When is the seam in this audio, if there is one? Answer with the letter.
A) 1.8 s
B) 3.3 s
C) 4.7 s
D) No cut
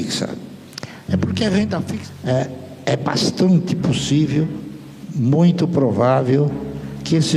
A